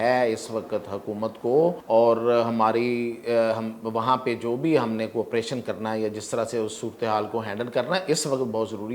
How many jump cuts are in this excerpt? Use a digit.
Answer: 1